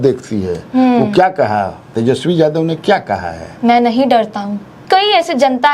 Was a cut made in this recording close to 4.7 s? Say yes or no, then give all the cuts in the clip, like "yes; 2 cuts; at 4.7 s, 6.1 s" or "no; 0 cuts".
yes; 1 cut; at 4.7 s